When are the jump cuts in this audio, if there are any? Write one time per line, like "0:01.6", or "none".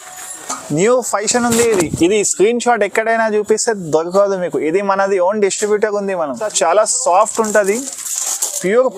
0:06.4

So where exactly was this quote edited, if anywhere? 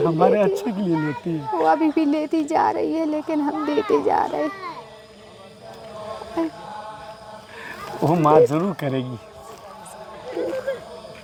none

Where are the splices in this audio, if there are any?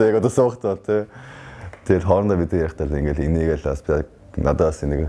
none

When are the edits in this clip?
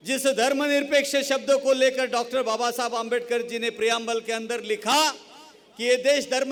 none

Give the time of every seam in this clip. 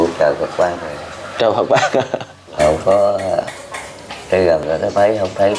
0:02.6

